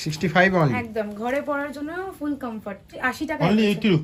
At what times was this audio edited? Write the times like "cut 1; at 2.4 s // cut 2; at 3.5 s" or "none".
cut 1; at 2.9 s